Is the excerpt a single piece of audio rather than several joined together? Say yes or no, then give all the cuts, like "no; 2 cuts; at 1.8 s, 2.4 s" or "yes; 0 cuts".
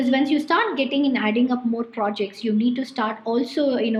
yes; 0 cuts